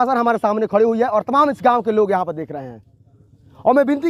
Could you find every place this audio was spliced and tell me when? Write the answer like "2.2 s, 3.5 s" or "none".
none